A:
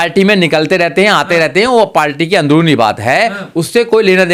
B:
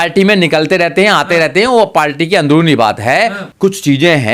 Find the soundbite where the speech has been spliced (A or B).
B